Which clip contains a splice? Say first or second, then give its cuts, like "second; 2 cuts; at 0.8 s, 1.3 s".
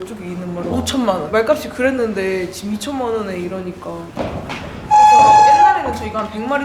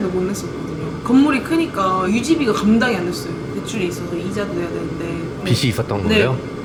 first; 2 cuts; at 1.3 s, 4.0 s